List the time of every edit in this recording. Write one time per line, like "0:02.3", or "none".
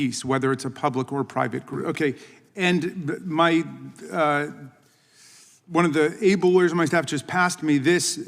0:01.8